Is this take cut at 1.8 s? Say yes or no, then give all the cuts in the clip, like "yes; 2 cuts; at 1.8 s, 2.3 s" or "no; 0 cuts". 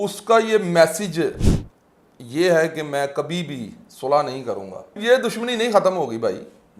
no; 1 cut; at 5.0 s